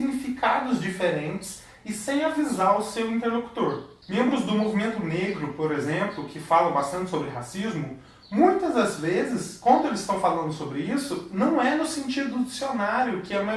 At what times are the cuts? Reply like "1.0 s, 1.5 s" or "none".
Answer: 11.7 s